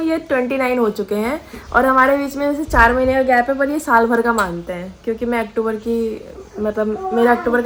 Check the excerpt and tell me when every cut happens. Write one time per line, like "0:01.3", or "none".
none